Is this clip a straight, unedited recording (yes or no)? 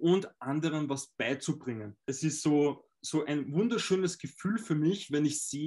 no